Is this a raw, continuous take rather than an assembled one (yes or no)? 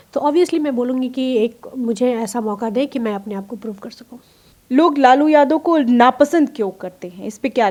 yes